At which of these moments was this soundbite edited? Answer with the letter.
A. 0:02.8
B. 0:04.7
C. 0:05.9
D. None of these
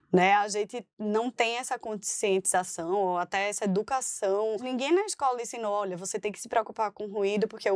B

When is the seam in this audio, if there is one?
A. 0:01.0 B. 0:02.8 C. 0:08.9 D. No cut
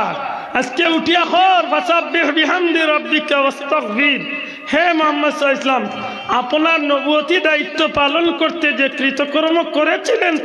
D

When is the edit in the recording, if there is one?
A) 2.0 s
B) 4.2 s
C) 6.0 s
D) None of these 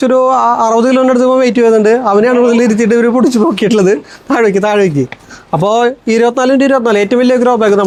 D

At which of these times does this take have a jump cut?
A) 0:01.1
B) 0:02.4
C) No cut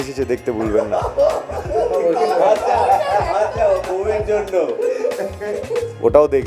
C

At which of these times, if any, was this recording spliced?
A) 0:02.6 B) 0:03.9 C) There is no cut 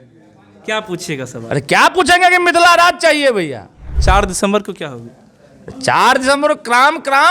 B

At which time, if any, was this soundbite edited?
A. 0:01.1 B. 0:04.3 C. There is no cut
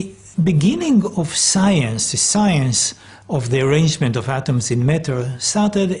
B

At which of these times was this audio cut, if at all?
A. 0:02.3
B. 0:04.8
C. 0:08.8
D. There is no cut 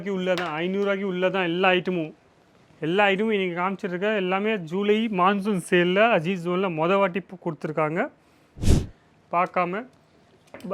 C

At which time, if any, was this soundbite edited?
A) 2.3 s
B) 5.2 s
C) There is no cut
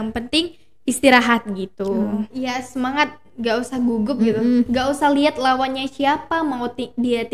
A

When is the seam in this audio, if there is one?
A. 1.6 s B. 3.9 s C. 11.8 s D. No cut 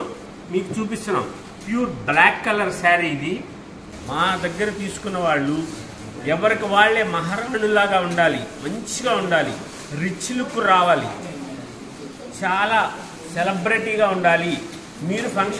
B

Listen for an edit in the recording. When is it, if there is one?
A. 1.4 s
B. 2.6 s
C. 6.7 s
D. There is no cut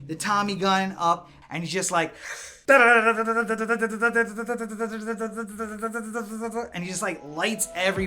A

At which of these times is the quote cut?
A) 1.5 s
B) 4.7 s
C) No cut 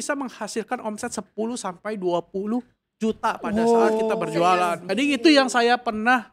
B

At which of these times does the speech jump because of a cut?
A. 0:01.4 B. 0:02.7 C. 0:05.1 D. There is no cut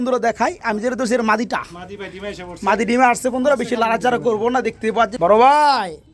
C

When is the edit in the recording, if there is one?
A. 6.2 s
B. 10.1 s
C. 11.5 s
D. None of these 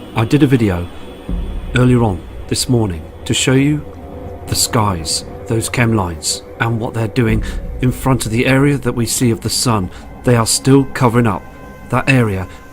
A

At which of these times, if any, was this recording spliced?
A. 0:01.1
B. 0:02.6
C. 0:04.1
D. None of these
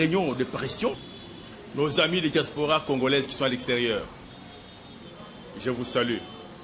A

